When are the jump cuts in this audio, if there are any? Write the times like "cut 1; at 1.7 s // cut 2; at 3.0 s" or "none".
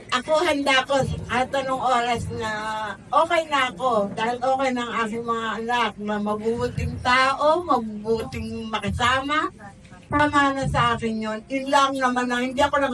none